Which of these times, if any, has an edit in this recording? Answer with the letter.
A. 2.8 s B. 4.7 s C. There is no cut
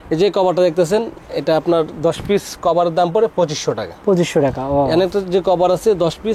C